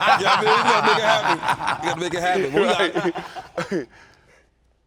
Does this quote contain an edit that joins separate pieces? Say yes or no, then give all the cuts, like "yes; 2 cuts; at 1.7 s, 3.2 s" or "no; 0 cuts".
no; 0 cuts